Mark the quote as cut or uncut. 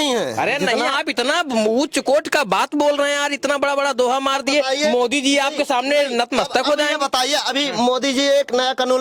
uncut